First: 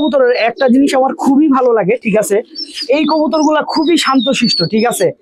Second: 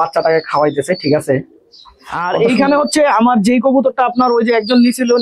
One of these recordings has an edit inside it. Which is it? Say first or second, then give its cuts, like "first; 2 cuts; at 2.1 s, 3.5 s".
second; 1 cut; at 2.2 s